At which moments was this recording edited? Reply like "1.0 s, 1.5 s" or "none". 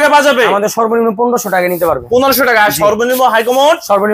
none